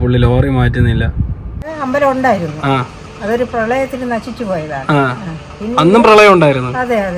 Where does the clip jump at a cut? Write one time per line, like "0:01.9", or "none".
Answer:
0:01.7